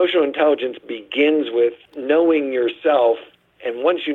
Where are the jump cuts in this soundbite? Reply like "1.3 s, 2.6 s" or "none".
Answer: 1.9 s